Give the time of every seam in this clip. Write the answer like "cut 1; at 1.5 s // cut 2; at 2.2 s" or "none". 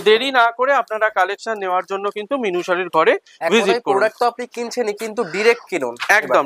none